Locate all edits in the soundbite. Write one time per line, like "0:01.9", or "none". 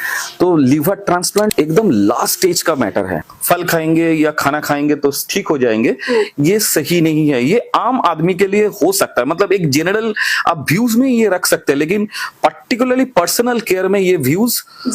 0:01.5
0:03.2